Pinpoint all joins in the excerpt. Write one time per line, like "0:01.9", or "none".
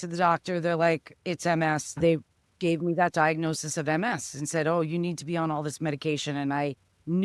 0:02.0